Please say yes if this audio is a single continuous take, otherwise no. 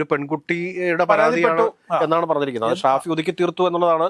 yes